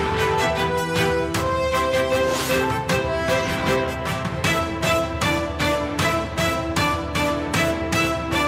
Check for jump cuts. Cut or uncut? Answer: uncut